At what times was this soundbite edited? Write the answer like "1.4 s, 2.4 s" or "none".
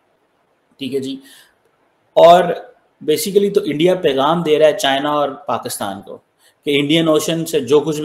none